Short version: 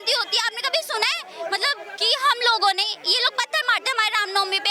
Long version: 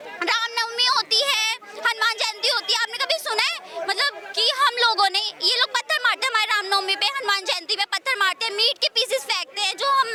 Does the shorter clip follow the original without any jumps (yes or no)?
yes